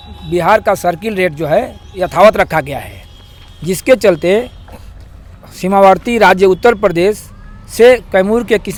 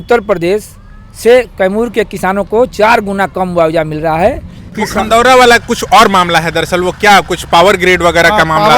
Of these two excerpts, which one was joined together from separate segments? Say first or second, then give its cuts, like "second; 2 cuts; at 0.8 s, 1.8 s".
second; 1 cut; at 4.7 s